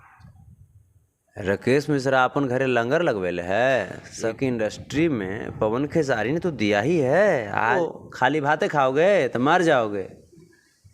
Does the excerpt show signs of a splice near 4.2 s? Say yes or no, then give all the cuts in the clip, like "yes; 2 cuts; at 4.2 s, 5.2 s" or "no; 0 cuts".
yes; 2 cuts; at 4.2 s, 7.7 s